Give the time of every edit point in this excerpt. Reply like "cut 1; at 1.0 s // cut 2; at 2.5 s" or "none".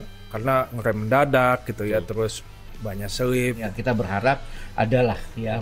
cut 1; at 3.6 s

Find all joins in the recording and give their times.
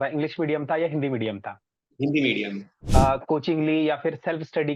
cut 1; at 2.8 s

